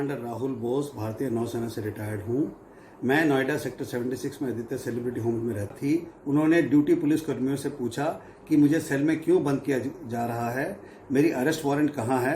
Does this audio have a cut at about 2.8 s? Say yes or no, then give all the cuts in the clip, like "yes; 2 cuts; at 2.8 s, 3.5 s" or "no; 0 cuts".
no; 1 cut; at 5.7 s